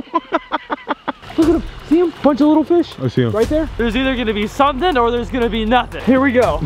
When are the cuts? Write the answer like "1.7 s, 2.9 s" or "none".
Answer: 1.2 s, 3.7 s